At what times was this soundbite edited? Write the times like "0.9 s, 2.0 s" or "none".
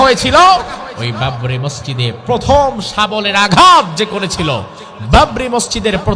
0.9 s